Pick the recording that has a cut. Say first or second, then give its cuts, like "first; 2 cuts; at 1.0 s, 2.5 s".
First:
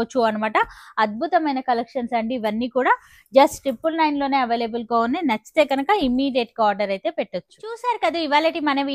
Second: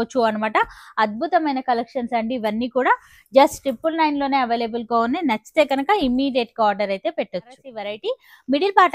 second; 1 cut; at 7.7 s